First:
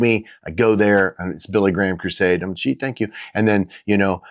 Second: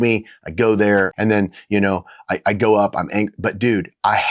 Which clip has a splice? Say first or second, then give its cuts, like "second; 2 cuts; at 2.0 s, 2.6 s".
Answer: second; 1 cut; at 1.1 s